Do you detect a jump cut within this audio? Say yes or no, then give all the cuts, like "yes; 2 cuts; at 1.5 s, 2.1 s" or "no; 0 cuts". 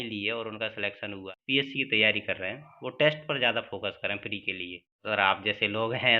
yes; 2 cuts; at 1.3 s, 5.0 s